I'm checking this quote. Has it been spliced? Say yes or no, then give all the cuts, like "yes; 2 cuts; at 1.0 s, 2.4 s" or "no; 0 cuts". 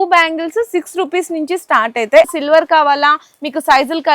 yes; 1 cut; at 2.3 s